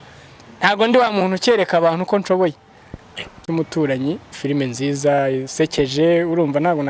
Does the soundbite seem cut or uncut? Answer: cut